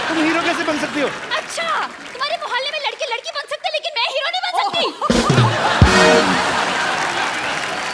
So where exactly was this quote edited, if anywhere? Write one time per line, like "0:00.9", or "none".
none